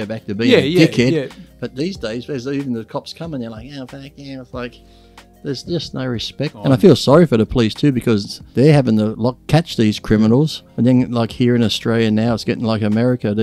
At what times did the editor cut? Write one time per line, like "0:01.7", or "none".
0:06.6
0:08.4
0:09.4
0:10.6